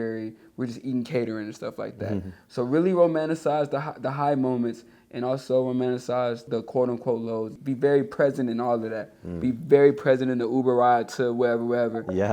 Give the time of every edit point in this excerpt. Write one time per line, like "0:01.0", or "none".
0:06.4
0:07.6